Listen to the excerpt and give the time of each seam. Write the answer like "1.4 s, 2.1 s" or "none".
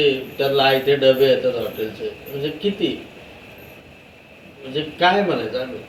none